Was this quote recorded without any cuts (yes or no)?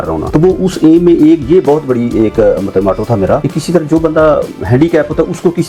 yes